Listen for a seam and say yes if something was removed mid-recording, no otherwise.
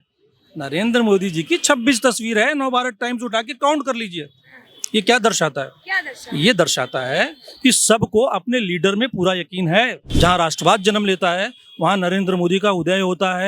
yes